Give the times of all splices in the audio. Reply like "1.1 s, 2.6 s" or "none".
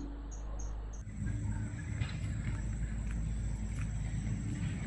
1.0 s